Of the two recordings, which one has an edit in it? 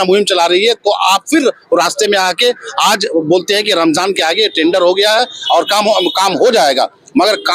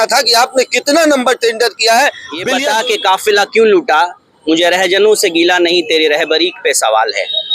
second; 1 cut; at 2.5 s

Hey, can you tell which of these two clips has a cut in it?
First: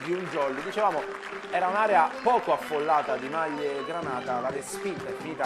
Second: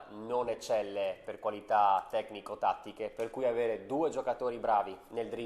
first; 1 cut; at 1.4 s

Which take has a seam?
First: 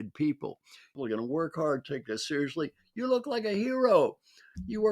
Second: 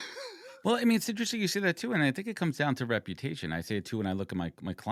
first; 1 cut; at 0.9 s

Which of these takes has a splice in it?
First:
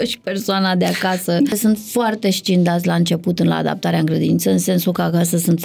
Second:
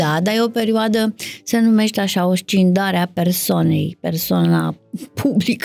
first; 1 cut; at 1.5 s

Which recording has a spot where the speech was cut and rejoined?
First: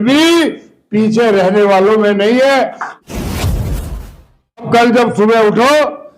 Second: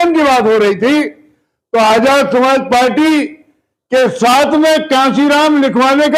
first; 2 cuts; at 2.9 s, 4.7 s

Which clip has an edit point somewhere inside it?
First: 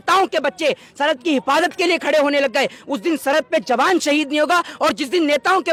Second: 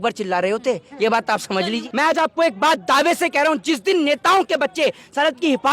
second; 1 cut; at 1.8 s

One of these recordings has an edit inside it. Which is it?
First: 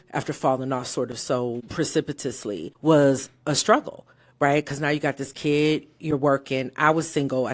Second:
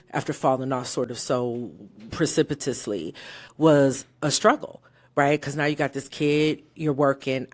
first; 2 cuts; at 1.6 s, 2.7 s

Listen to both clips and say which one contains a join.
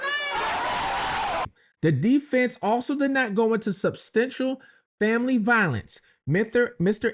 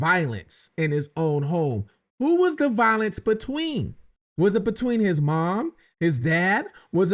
first; 1 cut; at 1.6 s

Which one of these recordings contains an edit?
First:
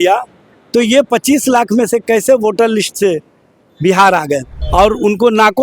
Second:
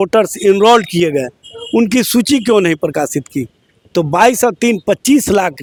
first; 1 cut; at 4.6 s

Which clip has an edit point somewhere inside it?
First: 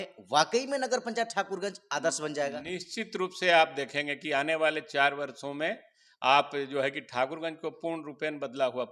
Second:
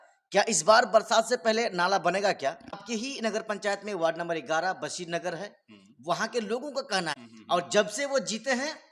second; 2 cuts; at 2.8 s, 7.2 s

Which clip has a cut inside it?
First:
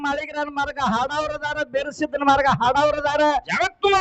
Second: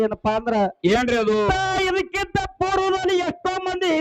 second; 1 cut; at 1.5 s

